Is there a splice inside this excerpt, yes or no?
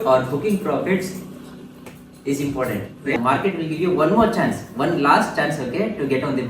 yes